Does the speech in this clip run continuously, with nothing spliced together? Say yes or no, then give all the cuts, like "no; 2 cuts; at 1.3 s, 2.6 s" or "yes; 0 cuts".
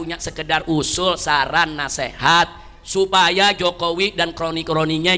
yes; 0 cuts